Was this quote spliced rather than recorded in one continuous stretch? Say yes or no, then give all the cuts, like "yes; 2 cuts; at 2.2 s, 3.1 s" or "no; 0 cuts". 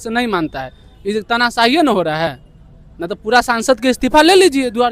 no; 0 cuts